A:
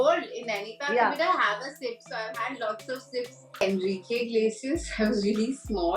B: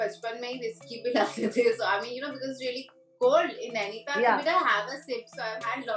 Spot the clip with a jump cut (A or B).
A